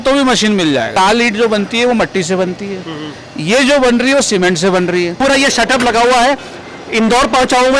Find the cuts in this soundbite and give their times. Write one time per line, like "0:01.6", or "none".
0:00.9
0:05.1